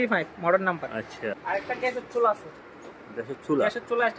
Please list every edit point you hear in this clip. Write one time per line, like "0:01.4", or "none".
0:01.2